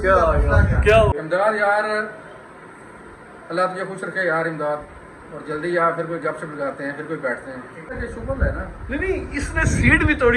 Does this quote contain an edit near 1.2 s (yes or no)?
yes